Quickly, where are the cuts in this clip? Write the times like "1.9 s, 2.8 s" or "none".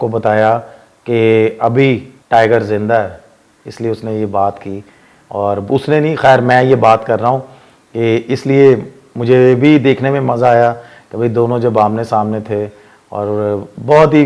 none